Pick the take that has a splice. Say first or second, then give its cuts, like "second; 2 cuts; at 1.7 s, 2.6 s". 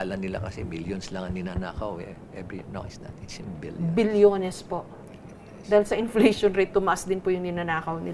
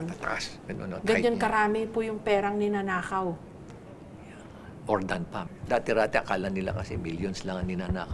second; 1 cut; at 5.4 s